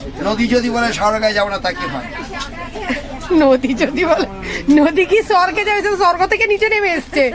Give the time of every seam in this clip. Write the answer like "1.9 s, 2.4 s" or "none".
none

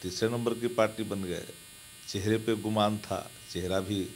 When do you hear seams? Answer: none

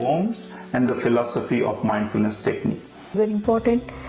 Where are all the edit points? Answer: 3.2 s

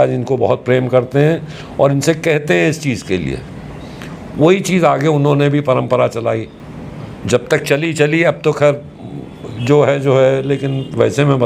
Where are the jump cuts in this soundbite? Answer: none

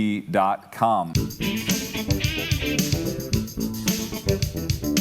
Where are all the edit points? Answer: 1.1 s

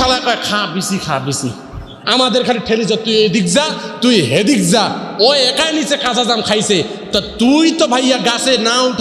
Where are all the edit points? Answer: 2.0 s

